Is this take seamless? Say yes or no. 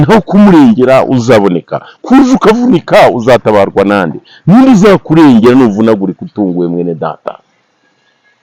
yes